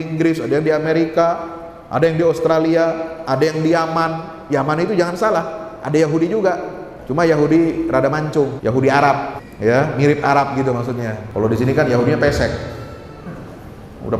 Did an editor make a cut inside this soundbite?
yes; 4 cuts; at 6.9 s, 8.6 s, 9.4 s, 11.2 s

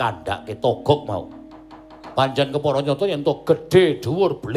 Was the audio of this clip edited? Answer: no; 0 cuts

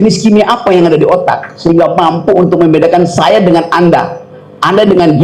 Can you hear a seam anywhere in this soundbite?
no; 0 cuts

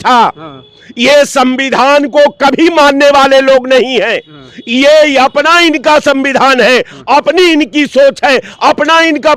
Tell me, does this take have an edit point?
no; 0 cuts

